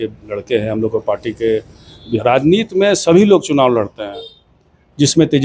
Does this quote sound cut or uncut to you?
cut